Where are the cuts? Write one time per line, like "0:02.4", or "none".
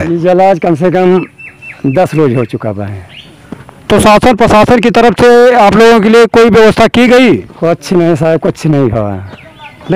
none

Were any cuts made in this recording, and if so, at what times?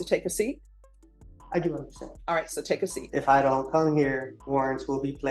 0:03.0
0:04.3

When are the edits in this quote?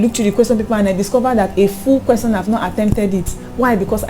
none

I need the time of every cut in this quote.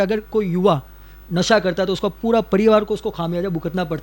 none

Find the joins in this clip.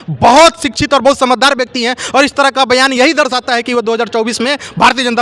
none

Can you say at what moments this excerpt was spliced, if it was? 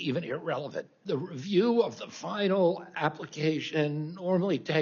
0:01.0

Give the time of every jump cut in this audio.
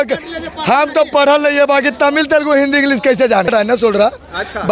0:03.5

